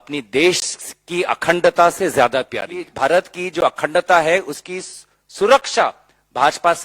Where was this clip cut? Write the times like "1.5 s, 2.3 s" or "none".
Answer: 2.9 s